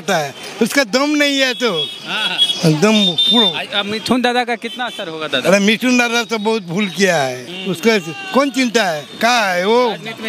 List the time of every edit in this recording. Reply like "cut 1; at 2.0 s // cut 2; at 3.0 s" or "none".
cut 1; at 7.5 s